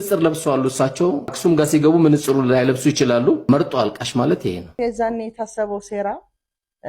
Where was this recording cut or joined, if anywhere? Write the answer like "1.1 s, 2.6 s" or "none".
1.3 s, 3.5 s, 4.8 s